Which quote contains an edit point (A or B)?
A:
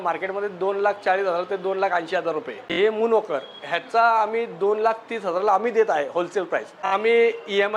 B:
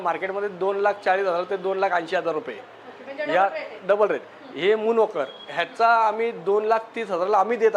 A